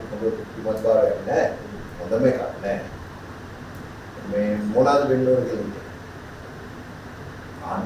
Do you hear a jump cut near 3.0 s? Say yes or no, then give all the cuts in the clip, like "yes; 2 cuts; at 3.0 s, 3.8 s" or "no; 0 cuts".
no; 0 cuts